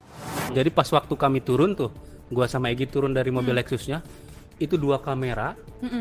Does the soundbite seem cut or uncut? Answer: uncut